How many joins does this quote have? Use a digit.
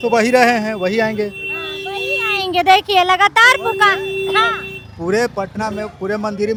0